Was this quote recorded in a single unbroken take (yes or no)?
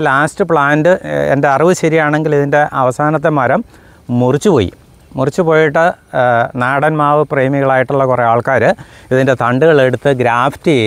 yes